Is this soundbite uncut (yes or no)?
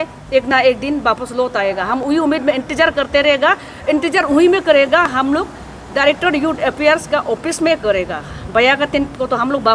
yes